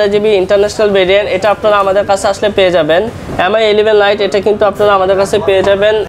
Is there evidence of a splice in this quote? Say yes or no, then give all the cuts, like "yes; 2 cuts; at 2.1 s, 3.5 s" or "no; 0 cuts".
no; 0 cuts